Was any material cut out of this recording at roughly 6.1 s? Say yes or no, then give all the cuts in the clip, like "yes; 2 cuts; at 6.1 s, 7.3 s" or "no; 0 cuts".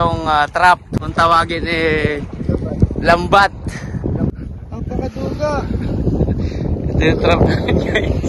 no; 2 cuts; at 1.0 s, 4.4 s